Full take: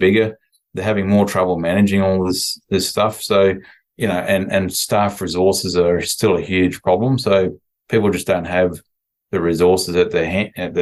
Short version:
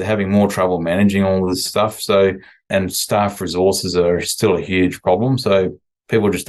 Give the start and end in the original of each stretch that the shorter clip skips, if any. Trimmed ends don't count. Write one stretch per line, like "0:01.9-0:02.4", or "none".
0:02.4-0:02.9
0:03.9-0:04.5